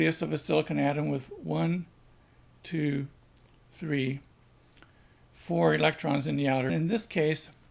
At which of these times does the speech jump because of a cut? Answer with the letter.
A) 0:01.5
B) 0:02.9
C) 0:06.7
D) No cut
D